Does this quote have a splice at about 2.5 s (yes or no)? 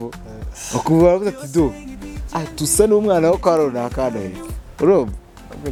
no